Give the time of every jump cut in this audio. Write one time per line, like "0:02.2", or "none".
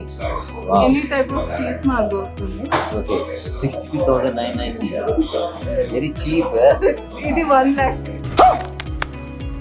none